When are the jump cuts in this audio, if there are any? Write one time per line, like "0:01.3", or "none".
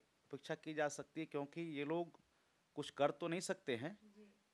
none